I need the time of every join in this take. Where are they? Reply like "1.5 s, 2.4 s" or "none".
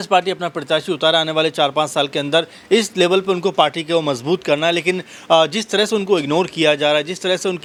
none